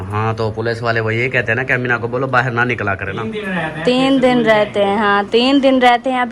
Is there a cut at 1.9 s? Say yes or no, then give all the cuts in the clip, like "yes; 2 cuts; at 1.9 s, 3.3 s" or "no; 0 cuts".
no; 1 cut; at 3.1 s